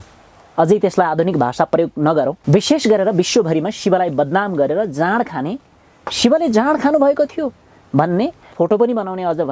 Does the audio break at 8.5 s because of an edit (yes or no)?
yes